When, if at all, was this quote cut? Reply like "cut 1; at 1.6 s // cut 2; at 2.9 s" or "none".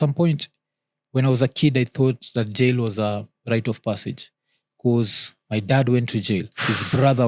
none